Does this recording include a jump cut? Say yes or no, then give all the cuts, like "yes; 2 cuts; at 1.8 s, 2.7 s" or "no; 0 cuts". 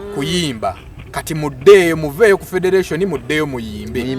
no; 0 cuts